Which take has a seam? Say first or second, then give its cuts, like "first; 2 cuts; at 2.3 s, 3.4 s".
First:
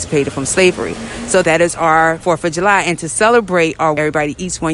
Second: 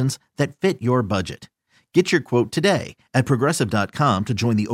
first; 3 cuts; at 1.4 s, 2.2 s, 4.0 s